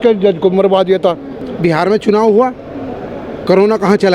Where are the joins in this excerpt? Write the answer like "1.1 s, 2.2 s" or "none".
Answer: 1.5 s